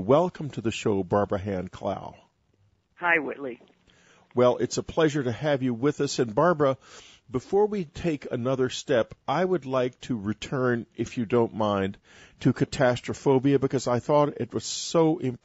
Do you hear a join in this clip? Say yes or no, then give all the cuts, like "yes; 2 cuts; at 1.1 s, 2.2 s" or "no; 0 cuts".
no; 0 cuts